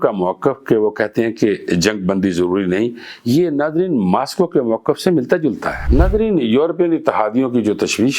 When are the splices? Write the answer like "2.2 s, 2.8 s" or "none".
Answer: 5.7 s